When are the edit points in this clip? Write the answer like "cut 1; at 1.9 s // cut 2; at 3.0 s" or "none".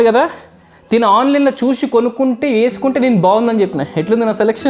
none